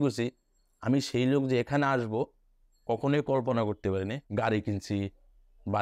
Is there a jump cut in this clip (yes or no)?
yes